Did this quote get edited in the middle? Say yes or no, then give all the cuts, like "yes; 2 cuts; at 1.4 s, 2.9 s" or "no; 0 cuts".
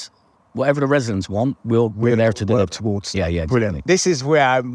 yes; 1 cut; at 3.8 s